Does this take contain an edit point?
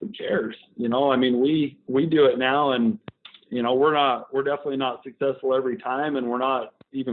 no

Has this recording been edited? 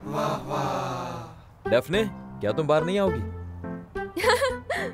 no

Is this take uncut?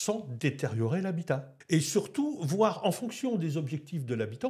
no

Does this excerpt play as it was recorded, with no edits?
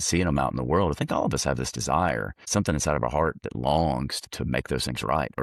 no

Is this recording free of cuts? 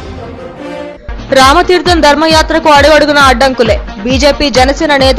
no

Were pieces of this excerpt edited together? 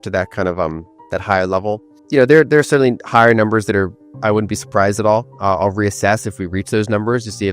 yes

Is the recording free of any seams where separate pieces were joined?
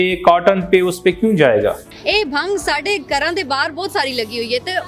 no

